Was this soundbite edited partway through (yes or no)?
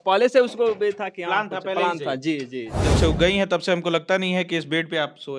yes